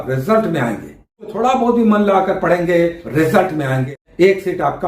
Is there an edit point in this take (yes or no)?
yes